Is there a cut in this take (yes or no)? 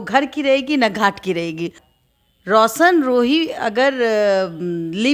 yes